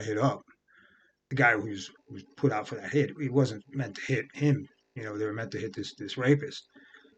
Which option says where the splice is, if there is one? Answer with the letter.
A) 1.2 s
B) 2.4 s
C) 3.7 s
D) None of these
A